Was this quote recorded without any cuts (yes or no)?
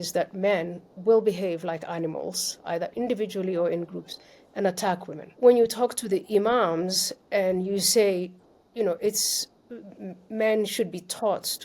no